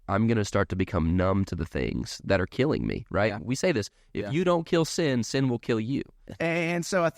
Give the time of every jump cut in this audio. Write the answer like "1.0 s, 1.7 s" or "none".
6.2 s